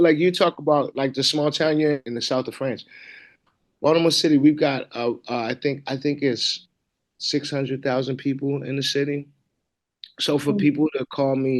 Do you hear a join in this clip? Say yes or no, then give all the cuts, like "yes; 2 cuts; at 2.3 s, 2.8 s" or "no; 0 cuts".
yes; 1 cut; at 2.0 s